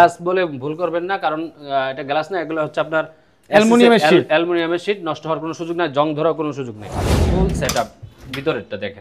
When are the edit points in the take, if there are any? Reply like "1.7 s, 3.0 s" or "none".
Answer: 7.2 s